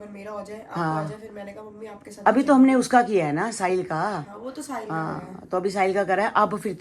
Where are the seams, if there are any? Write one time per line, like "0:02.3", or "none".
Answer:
none